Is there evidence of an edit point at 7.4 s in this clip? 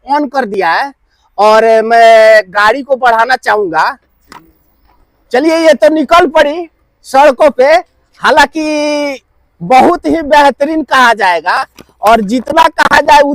no; 0 cuts

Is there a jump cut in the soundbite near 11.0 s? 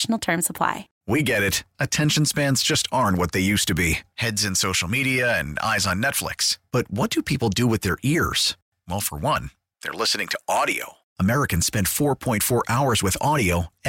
no; 1 cut; at 1.0 s

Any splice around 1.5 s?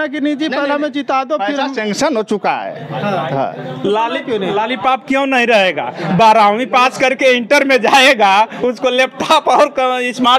no; 0 cuts

